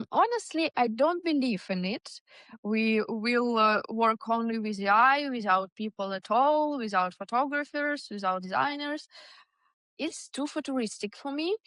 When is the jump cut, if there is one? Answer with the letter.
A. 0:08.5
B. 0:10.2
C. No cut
C